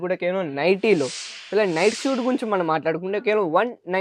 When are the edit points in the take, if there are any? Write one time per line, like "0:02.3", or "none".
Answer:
none